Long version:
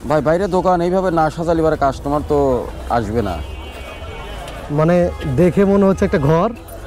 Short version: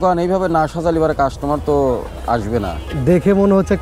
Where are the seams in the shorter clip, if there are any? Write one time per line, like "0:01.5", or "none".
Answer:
0:02.9